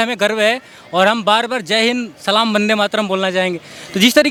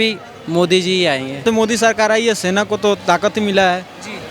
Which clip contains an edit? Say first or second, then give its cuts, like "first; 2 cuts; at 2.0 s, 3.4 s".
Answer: second; 1 cut; at 1.4 s